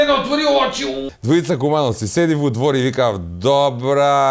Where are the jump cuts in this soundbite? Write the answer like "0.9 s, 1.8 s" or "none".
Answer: 1.1 s